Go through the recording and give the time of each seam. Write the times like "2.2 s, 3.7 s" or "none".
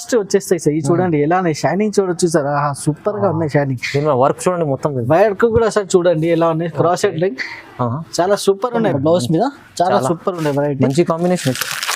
8.9 s